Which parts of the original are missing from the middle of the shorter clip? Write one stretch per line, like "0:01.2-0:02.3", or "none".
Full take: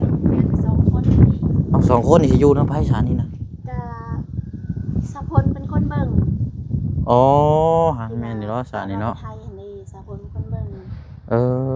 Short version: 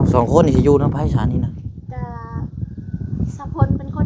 none